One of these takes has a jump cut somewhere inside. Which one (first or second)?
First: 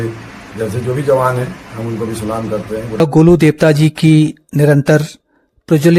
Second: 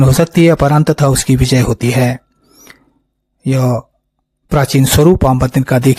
first